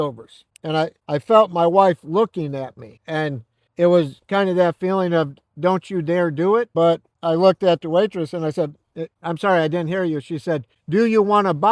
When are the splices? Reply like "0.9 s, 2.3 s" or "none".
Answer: none